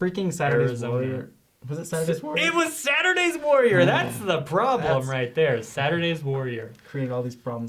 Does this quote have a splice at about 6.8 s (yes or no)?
yes